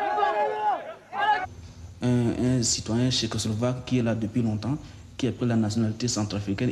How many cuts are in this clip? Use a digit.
0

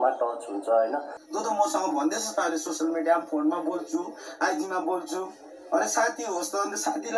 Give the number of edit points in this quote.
1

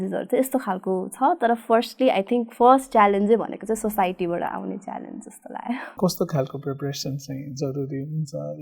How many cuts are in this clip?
1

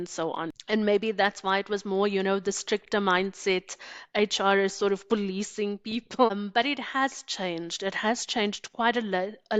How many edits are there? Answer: 0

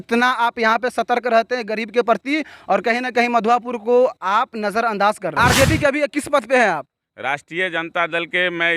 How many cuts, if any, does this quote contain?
1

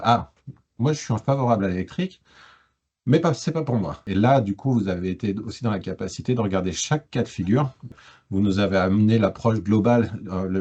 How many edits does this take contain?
2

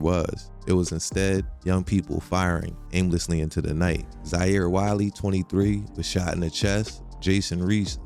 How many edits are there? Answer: 0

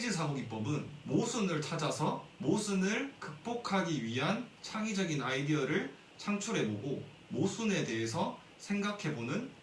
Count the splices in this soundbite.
2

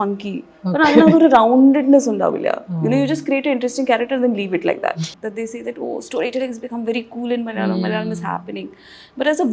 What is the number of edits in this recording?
1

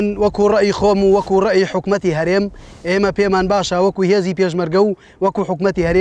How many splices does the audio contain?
0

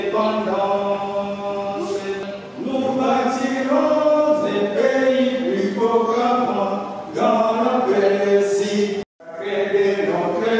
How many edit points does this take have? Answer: 2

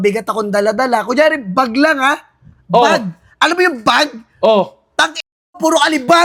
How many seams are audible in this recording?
0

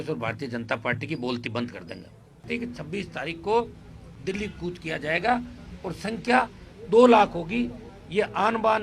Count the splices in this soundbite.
1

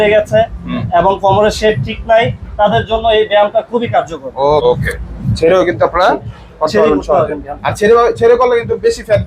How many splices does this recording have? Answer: 1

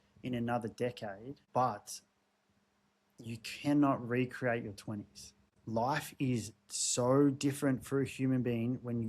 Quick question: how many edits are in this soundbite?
2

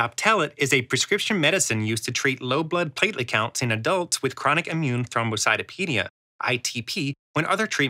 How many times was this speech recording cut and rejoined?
0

